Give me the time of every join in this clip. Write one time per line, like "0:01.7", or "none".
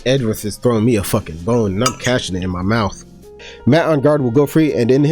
0:03.4